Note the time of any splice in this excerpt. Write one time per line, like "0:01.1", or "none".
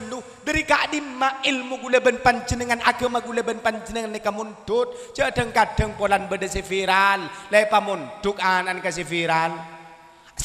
none